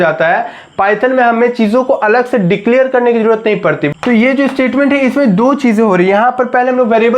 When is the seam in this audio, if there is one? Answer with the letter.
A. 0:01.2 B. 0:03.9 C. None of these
B